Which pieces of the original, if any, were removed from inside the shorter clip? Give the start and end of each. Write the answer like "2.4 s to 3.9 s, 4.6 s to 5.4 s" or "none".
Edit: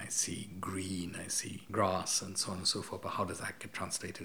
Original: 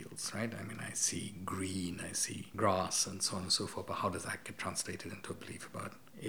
none